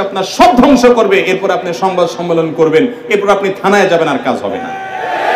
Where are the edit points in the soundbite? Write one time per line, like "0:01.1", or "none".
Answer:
none